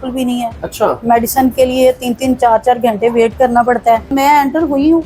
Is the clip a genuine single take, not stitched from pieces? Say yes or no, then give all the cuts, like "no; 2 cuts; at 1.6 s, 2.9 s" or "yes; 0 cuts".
no; 1 cut; at 4.1 s